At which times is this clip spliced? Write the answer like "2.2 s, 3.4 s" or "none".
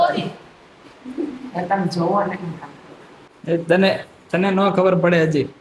none